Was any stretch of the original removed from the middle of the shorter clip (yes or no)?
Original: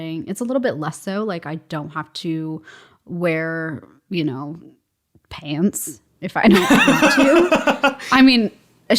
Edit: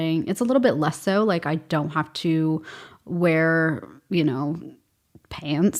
no